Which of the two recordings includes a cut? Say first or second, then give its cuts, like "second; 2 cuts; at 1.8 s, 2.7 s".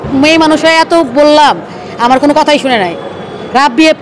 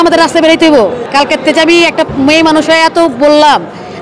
second; 1 cut; at 1.1 s